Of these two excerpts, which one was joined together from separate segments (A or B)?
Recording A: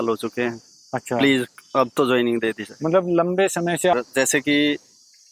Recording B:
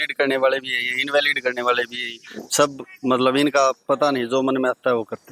A